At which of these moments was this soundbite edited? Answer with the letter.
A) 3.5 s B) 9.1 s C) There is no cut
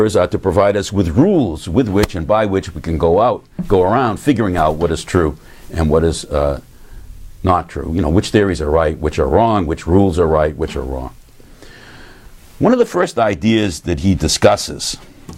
C